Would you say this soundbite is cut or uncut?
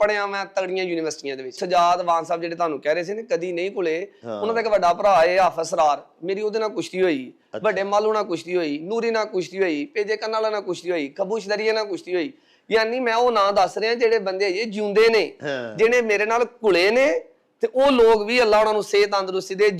cut